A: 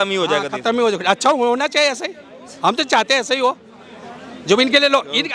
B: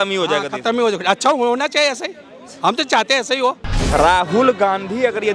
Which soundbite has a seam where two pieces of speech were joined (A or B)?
B